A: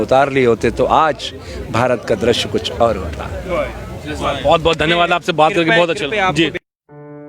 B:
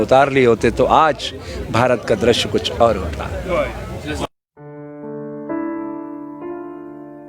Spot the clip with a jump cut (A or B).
B